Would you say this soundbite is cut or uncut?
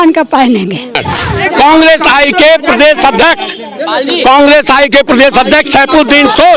cut